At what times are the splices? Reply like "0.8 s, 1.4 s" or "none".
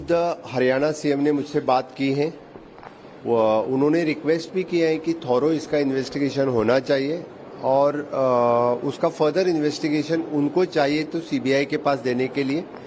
1.9 s